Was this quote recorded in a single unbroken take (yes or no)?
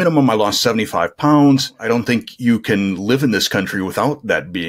no